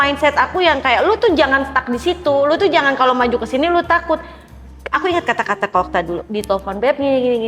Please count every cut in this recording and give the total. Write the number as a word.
zero